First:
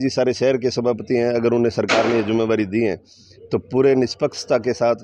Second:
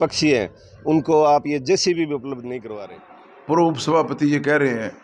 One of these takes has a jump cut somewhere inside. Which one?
second; 1 cut; at 2.7 s

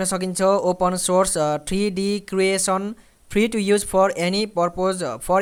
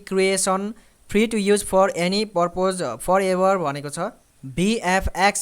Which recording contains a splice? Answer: second; 1 cut; at 4.3 s

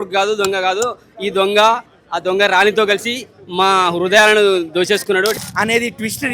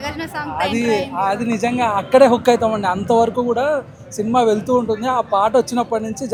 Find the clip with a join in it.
first; 1 cut; at 5.3 s

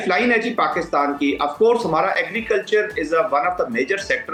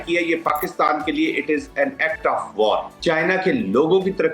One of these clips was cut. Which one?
second; 1 cut; at 2.9 s

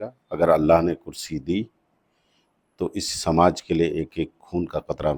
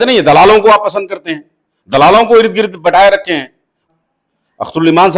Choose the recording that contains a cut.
second; 1 cut; at 3.9 s

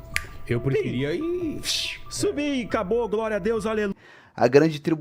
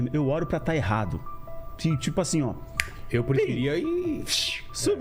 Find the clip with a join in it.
first; 1 cut; at 3.9 s

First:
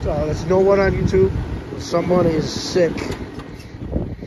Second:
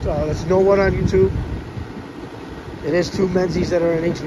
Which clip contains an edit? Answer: first; 1 cut; at 1.8 s

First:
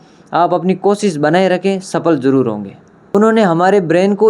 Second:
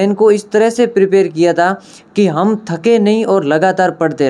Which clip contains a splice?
first; 1 cut; at 3.0 s

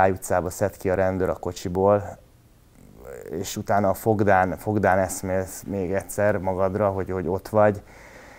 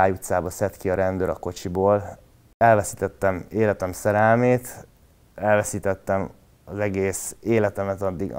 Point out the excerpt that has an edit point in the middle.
second; 1 cut; at 2.5 s

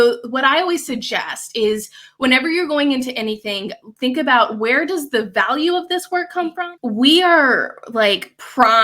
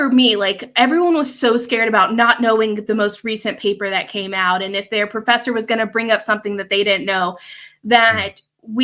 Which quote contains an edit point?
first; 1 cut; at 6.5 s

